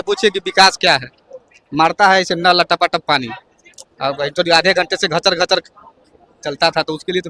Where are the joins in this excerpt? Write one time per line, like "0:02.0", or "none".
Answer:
none